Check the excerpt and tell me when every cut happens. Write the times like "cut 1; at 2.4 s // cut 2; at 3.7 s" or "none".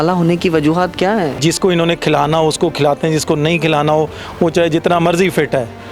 cut 1; at 1.4 s